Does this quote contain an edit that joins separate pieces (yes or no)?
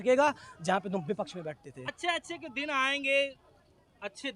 no